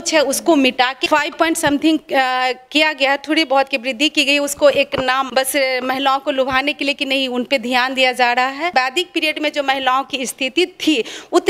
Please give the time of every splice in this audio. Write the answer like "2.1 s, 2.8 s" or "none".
1.0 s, 5.3 s, 8.7 s

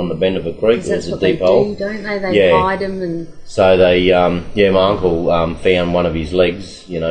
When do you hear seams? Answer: none

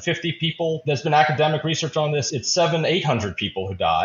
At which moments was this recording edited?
0.8 s, 2.4 s

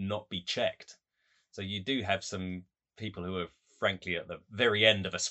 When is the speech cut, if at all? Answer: 4.4 s

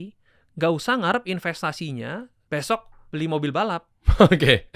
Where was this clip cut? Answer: 2.3 s

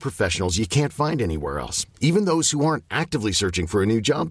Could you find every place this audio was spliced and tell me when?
none

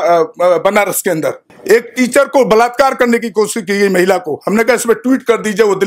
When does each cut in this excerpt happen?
1.5 s

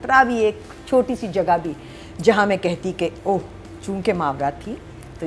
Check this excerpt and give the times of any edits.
none

